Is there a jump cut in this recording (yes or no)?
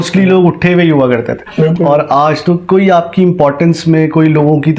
no